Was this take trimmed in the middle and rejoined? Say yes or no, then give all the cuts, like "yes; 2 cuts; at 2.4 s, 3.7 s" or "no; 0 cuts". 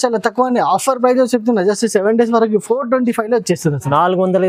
no; 0 cuts